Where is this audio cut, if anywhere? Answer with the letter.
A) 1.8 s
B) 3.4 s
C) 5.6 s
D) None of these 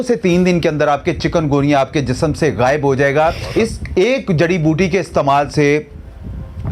B